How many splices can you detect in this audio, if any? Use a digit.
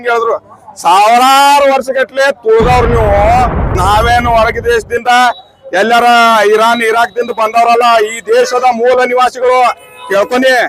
1